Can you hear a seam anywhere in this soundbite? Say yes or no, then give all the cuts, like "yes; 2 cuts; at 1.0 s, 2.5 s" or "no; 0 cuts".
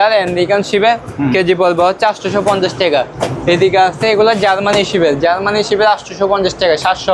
no; 0 cuts